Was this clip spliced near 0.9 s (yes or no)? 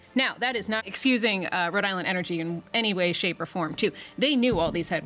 yes